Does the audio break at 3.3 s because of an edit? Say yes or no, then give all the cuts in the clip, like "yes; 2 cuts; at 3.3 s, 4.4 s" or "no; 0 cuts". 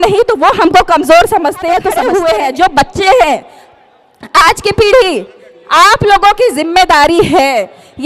no; 1 cut; at 2.0 s